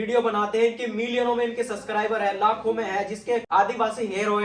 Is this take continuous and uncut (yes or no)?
no